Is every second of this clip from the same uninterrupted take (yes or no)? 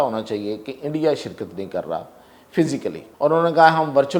no